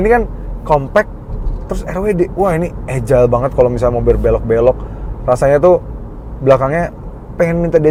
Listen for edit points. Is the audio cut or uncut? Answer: uncut